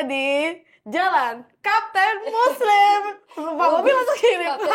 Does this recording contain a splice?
no; 0 cuts

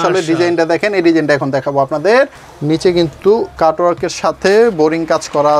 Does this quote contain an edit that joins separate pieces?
yes; 1 cut; at 2.5 s

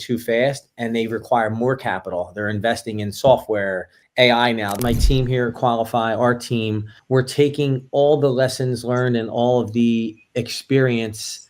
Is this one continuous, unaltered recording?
no; 1 cut; at 4.8 s

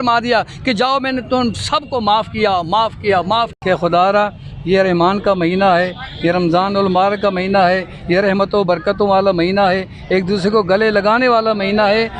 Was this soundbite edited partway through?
yes; 1 cut; at 3.5 s

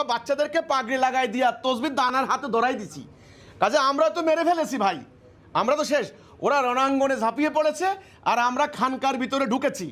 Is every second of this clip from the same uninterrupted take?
yes; 0 cuts

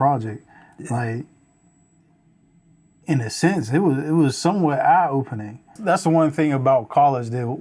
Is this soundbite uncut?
no; 1 cut; at 5.8 s

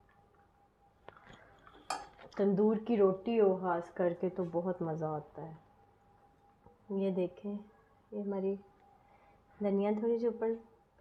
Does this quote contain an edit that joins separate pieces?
no; 0 cuts

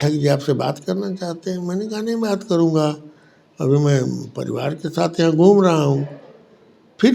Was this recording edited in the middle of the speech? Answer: no; 0 cuts

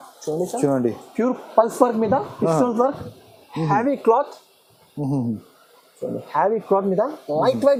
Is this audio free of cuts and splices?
yes; 0 cuts

